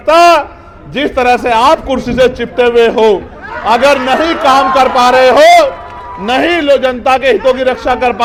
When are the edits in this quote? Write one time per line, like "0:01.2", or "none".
none